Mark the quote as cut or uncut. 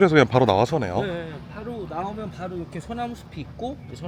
uncut